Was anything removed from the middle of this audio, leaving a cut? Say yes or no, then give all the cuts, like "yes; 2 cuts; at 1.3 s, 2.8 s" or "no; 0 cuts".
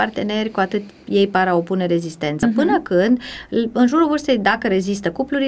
no; 0 cuts